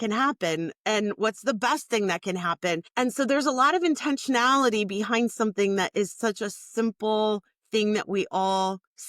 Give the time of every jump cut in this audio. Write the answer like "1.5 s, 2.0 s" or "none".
2.9 s